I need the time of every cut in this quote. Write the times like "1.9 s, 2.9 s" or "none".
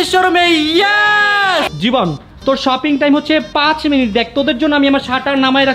1.7 s